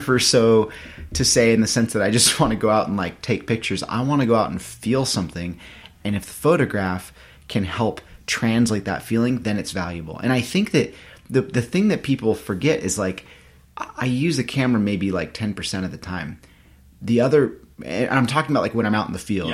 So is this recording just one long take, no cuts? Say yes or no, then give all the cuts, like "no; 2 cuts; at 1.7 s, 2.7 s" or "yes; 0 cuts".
yes; 0 cuts